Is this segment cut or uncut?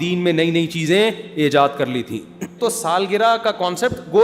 cut